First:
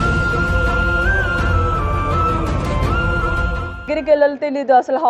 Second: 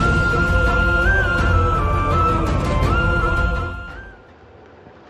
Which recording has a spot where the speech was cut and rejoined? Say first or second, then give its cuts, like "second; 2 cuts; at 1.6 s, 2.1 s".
first; 1 cut; at 3.9 s